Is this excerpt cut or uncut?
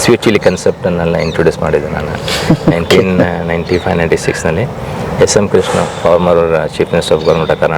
uncut